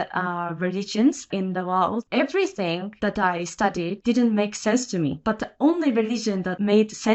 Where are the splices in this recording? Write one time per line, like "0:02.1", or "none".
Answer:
none